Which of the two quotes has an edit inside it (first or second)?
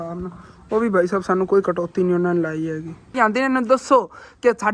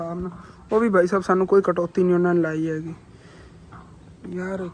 first